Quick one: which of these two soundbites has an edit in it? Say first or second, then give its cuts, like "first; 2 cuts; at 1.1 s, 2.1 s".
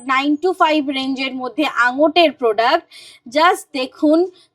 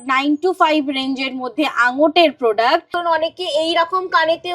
second; 1 cut; at 2.9 s